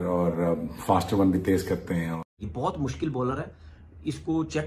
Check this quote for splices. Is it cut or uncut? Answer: cut